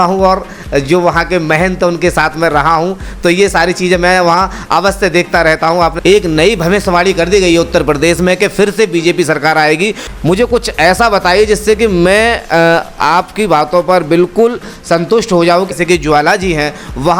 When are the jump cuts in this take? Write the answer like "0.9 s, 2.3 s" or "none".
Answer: 6.0 s, 10.0 s, 15.7 s

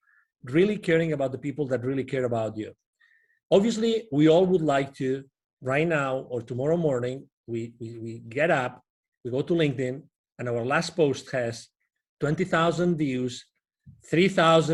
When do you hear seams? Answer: none

